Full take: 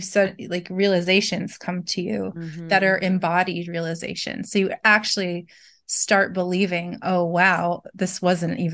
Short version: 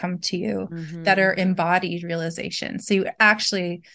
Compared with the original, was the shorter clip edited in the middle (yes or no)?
no